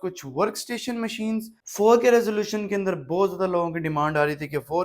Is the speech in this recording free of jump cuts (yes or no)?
no